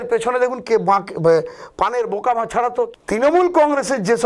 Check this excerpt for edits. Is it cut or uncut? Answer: cut